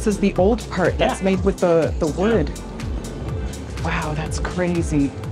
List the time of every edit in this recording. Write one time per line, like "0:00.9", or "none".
none